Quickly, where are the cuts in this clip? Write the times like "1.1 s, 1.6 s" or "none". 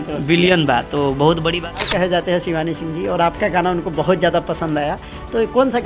1.8 s